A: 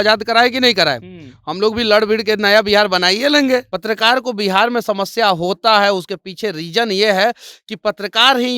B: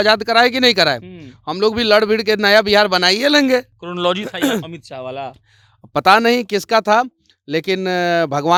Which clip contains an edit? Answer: A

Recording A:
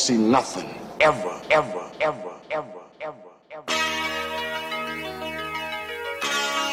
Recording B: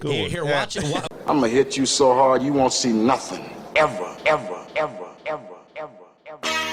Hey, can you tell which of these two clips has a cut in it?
B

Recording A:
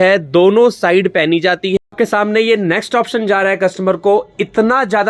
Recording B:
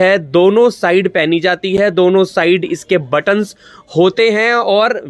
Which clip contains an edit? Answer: A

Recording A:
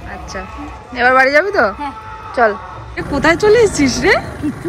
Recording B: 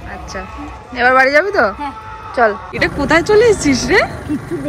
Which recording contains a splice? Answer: B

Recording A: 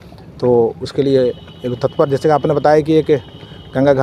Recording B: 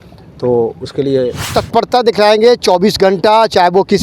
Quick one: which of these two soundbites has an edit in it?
B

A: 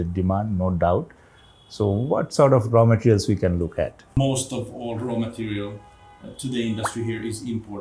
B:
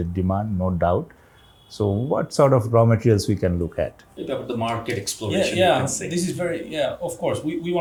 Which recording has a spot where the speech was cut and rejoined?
A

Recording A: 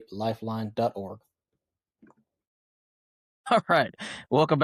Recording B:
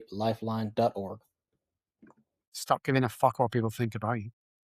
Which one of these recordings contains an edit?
B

